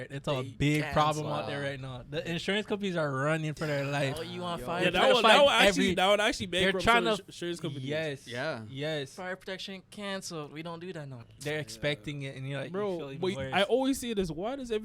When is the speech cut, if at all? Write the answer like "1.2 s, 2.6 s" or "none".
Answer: 11.3 s

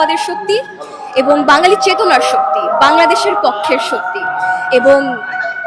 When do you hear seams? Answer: none

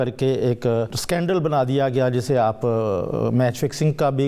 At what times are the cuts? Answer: 1.0 s

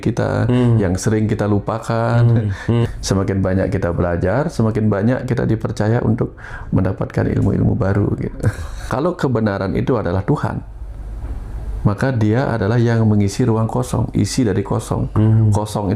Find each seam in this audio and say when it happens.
2.9 s, 8.9 s

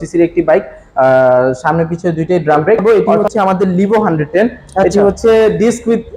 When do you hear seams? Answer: 2.8 s

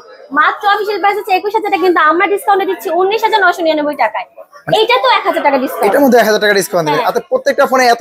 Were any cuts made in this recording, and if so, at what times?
none

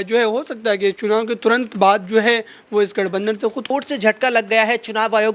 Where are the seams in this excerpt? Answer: 3.7 s

